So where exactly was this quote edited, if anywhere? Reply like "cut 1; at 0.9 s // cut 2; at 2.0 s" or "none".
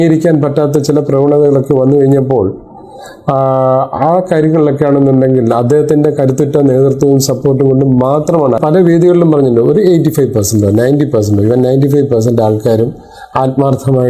cut 1; at 8.6 s

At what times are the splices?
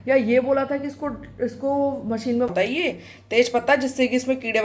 cut 1; at 2.5 s

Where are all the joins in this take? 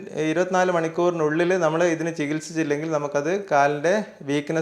none

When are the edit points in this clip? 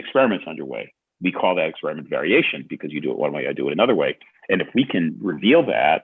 none

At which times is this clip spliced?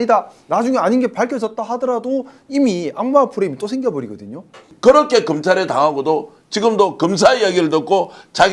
cut 1; at 4.6 s

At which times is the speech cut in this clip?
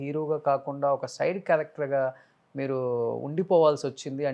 none

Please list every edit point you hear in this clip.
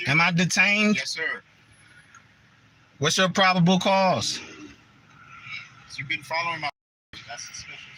none

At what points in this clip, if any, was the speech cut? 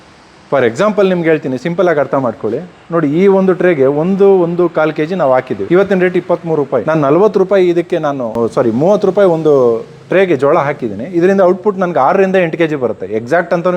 cut 1; at 5.6 s // cut 2; at 6.8 s // cut 3; at 8.3 s

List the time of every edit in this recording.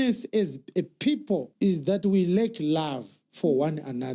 cut 1; at 1.5 s

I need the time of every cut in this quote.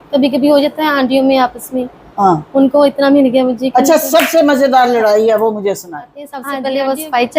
cut 1; at 6.4 s

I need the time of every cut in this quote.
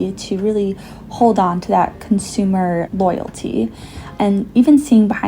cut 1; at 2.9 s // cut 2; at 4.0 s

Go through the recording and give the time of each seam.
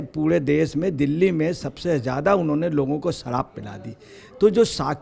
none

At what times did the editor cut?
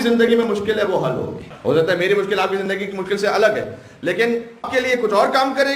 cut 1; at 1.4 s // cut 2; at 4.7 s

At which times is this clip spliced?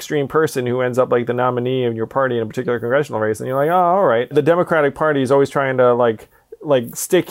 cut 1; at 4.3 s

